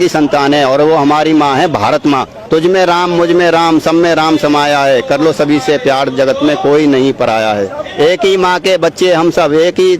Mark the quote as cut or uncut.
cut